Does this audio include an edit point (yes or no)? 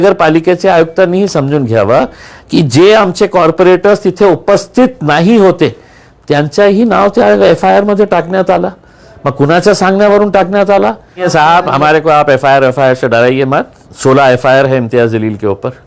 yes